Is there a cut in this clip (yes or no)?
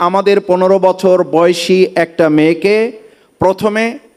no